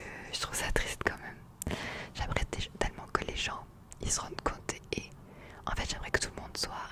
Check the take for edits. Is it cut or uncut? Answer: uncut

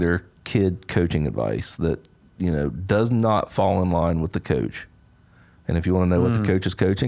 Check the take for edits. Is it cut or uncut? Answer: uncut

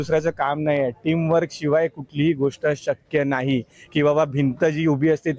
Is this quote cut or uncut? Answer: uncut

